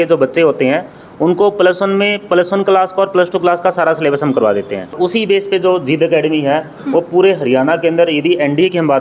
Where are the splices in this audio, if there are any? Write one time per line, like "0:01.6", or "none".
0:05.0